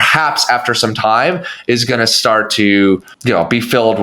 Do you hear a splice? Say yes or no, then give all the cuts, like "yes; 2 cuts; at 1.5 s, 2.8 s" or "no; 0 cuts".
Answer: yes; 1 cut; at 3.1 s